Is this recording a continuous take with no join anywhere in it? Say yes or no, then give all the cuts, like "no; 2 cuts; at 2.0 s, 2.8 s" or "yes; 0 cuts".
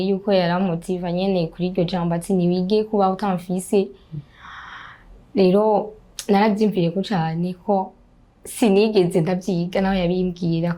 yes; 0 cuts